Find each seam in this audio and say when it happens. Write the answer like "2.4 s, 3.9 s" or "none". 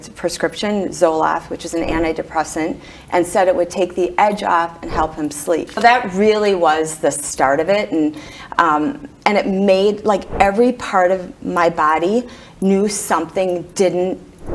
5.8 s